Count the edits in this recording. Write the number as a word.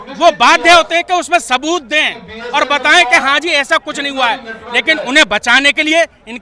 zero